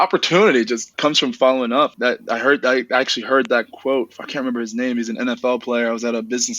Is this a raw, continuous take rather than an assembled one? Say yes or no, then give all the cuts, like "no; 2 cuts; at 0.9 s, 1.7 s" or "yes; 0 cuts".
no; 2 cuts; at 0.9 s, 1.9 s